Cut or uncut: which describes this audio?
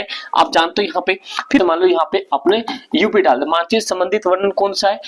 cut